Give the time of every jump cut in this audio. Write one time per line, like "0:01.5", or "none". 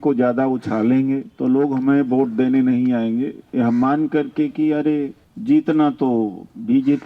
0:01.3
0:05.2